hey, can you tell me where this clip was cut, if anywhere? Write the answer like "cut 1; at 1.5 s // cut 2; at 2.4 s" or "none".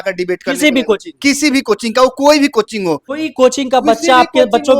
cut 1; at 3.1 s